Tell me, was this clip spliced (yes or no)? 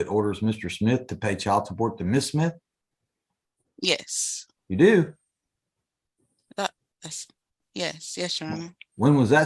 no